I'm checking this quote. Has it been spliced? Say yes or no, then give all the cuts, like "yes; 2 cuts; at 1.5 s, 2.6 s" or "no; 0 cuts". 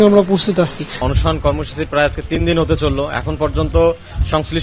no; 0 cuts